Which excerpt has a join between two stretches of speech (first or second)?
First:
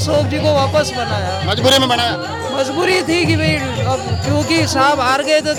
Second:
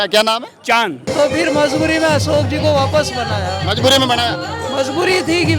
second